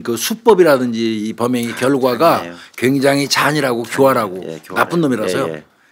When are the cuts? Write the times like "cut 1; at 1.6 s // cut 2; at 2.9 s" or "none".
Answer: none